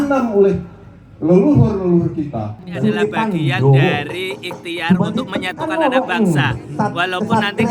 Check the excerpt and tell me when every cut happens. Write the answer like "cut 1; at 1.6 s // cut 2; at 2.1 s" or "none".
cut 1; at 2.7 s

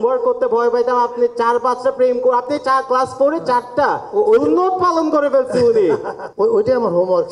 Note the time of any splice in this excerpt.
none

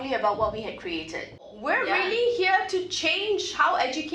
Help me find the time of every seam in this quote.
cut 1; at 1.5 s

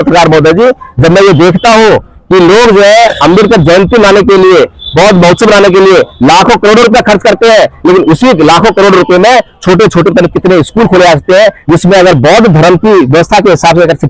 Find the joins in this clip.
none

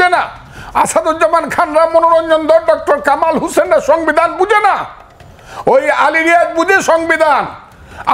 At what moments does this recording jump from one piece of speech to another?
none

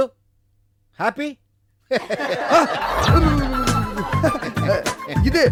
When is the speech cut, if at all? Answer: none

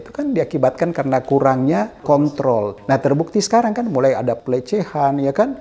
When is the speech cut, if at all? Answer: cut 1; at 2.0 s // cut 2; at 2.8 s // cut 3; at 4.4 s

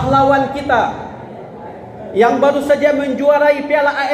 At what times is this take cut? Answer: none

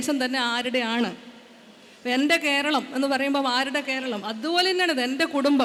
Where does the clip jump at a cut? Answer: none

